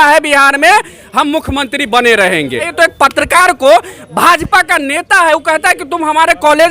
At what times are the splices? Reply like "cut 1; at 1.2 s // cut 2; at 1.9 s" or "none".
cut 1; at 2.7 s